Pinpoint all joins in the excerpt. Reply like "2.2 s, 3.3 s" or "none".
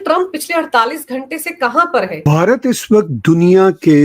2.2 s